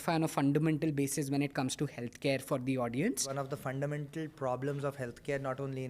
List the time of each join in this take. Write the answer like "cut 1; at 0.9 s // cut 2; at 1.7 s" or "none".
cut 1; at 3.3 s